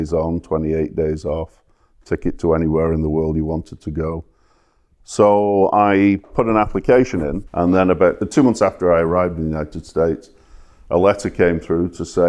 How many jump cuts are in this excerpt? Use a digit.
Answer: 1